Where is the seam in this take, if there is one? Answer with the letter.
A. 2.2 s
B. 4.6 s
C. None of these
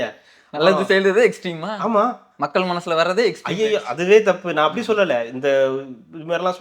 C